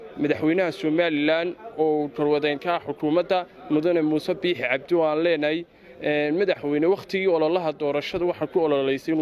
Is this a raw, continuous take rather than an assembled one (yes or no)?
yes